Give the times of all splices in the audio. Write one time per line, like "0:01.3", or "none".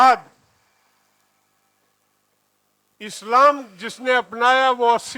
none